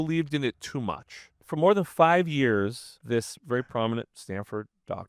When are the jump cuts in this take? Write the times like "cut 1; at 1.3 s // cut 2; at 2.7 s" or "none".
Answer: cut 1; at 1.4 s // cut 2; at 2.9 s // cut 3; at 4.2 s